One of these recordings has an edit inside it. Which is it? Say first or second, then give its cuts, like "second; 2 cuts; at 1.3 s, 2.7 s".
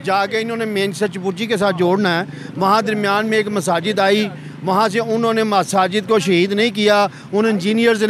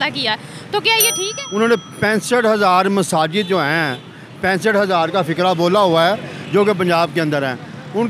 second; 1 cut; at 1.2 s